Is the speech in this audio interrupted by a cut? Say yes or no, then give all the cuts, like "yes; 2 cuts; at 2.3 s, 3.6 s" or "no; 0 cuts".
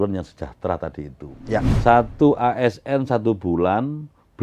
yes; 1 cut; at 1.7 s